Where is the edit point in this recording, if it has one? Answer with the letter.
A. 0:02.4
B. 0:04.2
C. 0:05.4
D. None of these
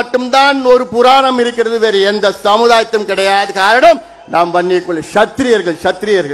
D